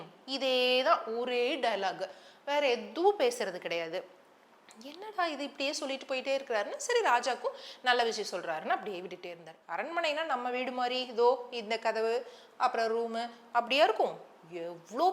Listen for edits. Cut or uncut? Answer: cut